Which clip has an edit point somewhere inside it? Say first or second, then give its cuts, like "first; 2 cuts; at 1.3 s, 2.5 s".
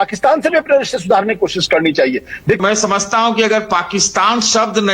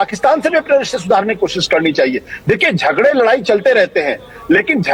first; 1 cut; at 2.6 s